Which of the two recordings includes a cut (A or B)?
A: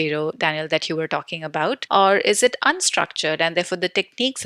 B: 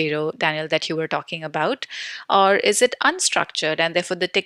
A